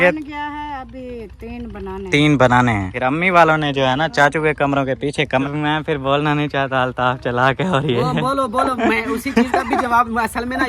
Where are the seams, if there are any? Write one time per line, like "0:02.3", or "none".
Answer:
0:02.9
0:05.5